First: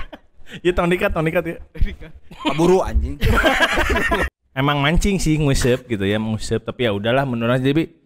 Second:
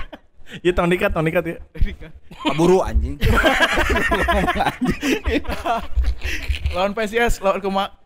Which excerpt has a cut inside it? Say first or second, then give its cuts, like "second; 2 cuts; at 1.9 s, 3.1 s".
first; 1 cut; at 4.2 s